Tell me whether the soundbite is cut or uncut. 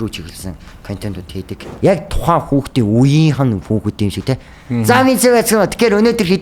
cut